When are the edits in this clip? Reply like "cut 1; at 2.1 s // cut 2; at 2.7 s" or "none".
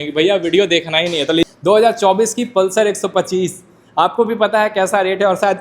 cut 1; at 1.4 s